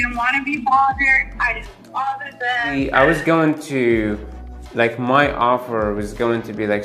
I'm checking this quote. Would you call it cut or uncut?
cut